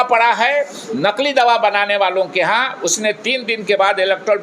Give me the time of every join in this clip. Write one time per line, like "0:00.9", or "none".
none